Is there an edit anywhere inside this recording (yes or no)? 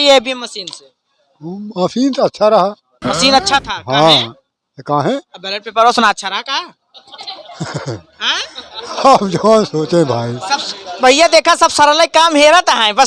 no